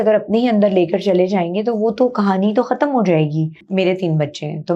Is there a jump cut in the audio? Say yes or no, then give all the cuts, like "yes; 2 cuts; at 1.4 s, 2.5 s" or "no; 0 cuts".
yes; 1 cut; at 3.6 s